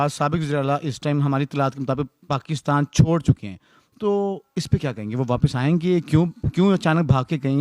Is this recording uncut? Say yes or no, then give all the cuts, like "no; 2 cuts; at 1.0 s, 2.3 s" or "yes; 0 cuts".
yes; 0 cuts